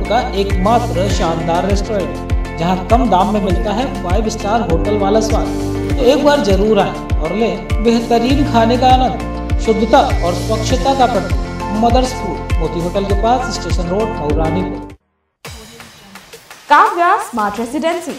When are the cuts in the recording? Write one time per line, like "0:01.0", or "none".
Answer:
0:15.0